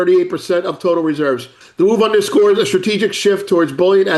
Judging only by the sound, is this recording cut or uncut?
cut